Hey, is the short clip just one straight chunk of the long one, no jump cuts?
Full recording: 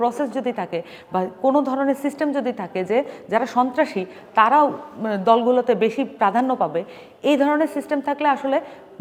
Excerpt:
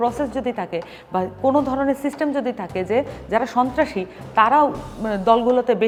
yes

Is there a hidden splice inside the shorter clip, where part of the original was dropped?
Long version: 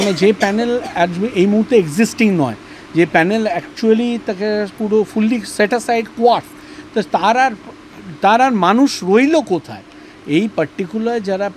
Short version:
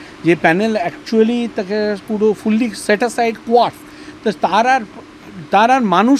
no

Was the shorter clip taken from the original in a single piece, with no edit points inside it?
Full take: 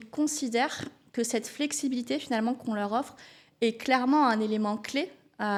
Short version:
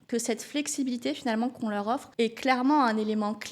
no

